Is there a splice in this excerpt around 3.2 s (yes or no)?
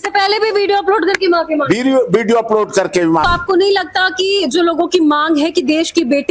yes